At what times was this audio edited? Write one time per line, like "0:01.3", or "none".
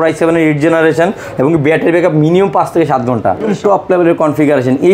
0:03.5

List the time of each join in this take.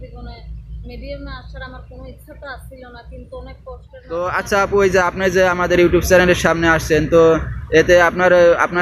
0:04.2

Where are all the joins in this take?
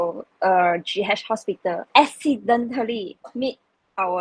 0:01.8

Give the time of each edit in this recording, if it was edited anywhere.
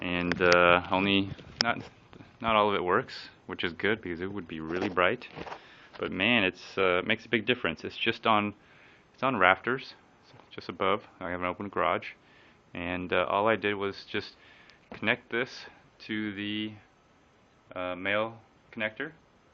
0:12.6

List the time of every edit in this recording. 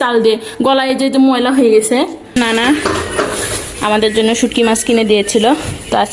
0:02.4

